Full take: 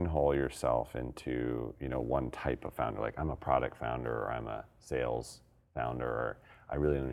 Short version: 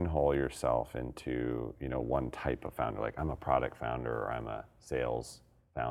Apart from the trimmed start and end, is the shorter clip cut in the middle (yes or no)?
no